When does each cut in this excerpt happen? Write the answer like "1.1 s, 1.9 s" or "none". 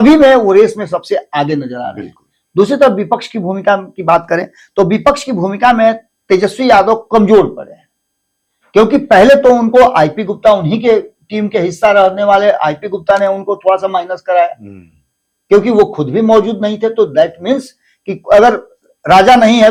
none